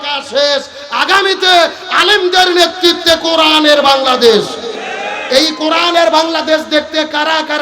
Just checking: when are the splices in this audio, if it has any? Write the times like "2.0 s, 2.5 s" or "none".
none